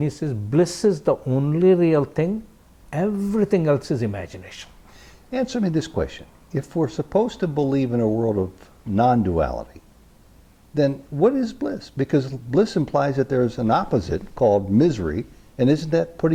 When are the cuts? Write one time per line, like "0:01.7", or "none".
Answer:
none